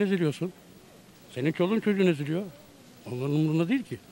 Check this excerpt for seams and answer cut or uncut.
uncut